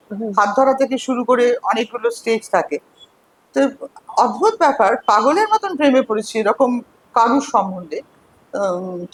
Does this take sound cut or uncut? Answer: uncut